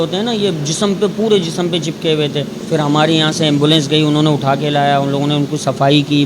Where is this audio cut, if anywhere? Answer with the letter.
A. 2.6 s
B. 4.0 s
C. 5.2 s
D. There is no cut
A